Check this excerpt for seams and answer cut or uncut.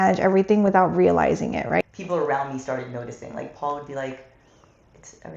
cut